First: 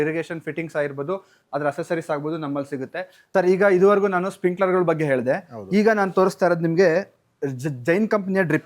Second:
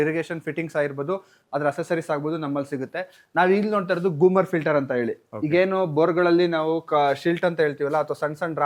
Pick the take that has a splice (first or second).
first